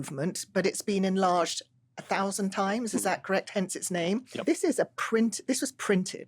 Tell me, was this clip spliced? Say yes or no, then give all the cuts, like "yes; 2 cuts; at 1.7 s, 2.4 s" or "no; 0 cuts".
yes; 1 cut; at 4.3 s